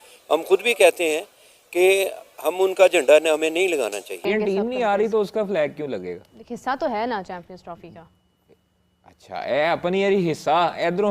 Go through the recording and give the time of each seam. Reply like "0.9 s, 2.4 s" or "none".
4.2 s